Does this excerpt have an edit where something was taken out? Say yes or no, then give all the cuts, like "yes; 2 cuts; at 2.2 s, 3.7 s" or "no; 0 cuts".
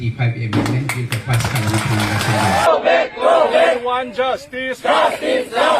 yes; 1 cut; at 2.7 s